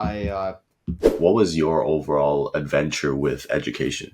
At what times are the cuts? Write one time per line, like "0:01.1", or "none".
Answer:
0:01.0